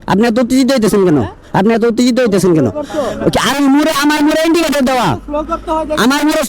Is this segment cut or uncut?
uncut